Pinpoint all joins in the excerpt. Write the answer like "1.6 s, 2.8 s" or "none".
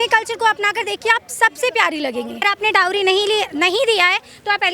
2.4 s